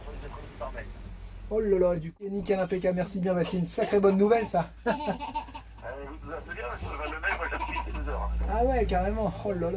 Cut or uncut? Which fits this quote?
cut